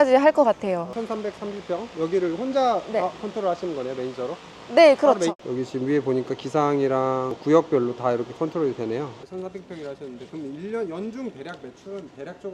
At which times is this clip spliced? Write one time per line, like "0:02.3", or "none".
0:00.9
0:09.6